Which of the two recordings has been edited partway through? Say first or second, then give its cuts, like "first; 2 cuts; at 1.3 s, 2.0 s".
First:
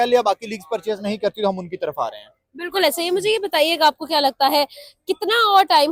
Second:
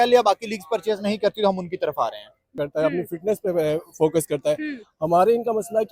second; 1 cut; at 2.6 s